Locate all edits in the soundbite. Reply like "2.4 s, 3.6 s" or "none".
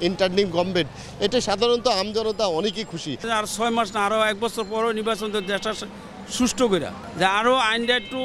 3.3 s, 7.0 s